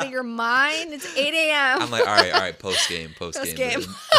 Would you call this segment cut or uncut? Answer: uncut